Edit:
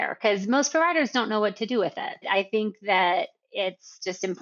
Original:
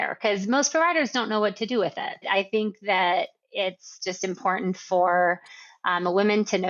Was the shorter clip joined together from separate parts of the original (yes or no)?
no